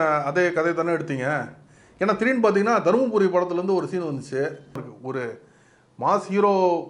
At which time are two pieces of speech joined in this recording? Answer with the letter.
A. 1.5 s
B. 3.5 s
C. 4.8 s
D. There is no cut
C